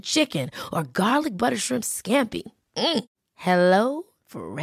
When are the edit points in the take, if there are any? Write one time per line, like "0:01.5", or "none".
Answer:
none